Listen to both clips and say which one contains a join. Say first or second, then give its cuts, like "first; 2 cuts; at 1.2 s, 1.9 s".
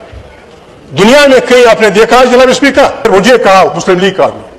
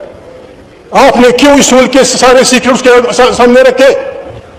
first; 1 cut; at 3.1 s